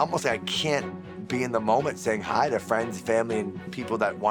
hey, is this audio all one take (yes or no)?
yes